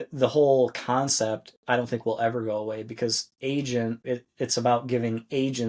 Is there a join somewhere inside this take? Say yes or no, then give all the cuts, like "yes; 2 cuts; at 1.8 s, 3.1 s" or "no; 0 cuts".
yes; 1 cut; at 4.0 s